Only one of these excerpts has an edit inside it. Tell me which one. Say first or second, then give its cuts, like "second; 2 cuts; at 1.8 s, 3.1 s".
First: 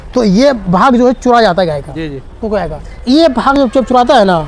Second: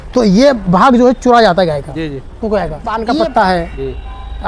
second; 1 cut; at 2.9 s